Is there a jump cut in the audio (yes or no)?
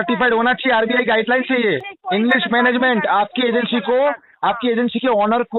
yes